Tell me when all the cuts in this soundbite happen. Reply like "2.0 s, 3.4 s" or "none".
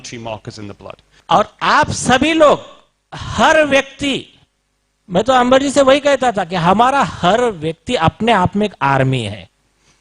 1.1 s

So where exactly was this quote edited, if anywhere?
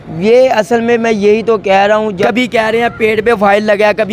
2.2 s

